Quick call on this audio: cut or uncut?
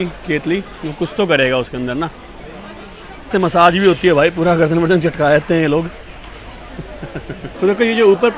cut